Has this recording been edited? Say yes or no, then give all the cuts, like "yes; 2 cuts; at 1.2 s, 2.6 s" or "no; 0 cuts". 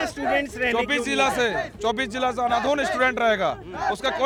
no; 0 cuts